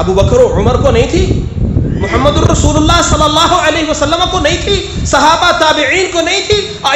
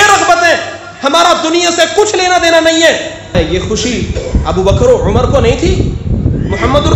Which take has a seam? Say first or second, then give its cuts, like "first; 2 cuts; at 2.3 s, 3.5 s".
second; 1 cut; at 3.3 s